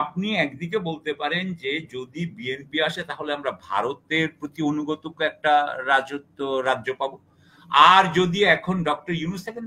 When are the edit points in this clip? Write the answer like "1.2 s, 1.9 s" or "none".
none